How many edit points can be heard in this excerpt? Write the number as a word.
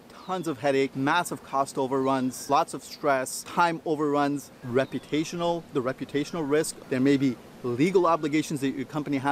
five